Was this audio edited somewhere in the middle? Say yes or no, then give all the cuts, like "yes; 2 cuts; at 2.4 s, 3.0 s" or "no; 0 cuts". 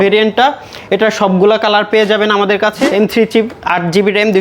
yes; 1 cut; at 2.8 s